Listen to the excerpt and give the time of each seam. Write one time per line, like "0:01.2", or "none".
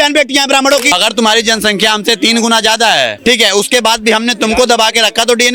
0:00.9
0:03.1